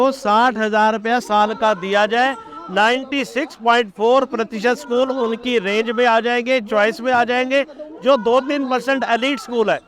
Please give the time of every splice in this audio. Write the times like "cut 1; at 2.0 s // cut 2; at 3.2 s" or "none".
none